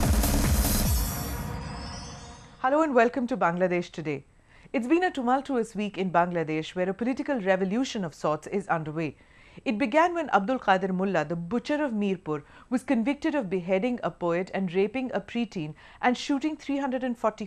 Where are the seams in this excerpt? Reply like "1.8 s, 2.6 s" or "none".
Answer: 9.4 s